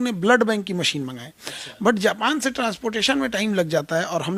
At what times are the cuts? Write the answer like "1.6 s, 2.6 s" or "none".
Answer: none

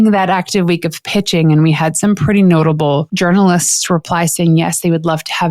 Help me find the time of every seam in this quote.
3.1 s

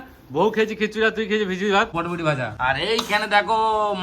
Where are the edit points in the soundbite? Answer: 1.9 s

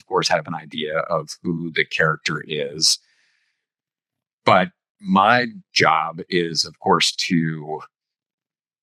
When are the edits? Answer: none

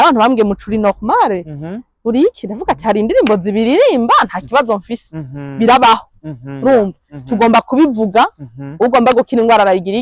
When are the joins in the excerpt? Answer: none

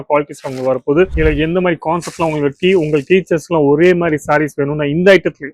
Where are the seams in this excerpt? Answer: 1.1 s

